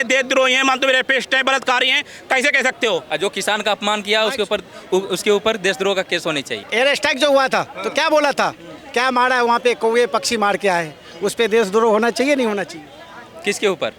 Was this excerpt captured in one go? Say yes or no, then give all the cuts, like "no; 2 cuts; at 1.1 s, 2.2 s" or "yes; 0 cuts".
no; 2 cuts; at 3.1 s, 6.7 s